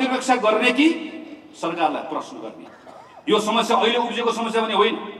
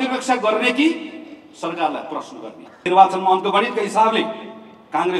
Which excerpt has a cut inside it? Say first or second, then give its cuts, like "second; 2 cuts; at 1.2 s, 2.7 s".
second; 1 cut; at 2.9 s